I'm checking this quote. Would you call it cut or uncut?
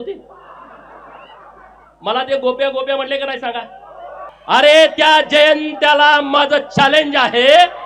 cut